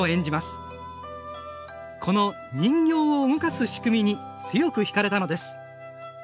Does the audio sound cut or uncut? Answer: cut